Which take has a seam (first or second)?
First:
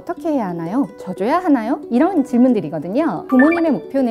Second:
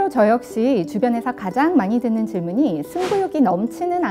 first